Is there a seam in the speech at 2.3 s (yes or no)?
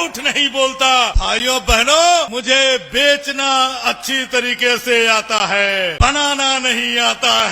yes